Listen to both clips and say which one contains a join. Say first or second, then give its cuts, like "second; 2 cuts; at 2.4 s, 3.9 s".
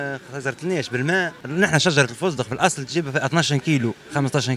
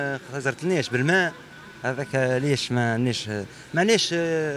first; 1 cut; at 1.4 s